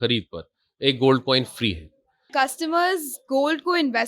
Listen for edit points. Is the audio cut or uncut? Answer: cut